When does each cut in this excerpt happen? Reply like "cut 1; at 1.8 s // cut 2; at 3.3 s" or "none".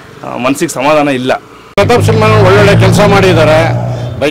cut 1; at 1.7 s